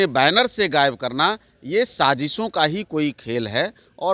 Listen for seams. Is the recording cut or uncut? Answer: uncut